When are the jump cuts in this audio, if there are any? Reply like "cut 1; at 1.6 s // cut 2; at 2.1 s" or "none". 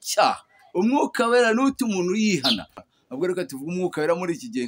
cut 1; at 2.8 s